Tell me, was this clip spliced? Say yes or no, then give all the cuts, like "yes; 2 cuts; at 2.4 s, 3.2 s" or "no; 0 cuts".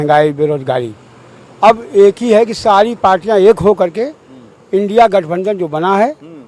no; 0 cuts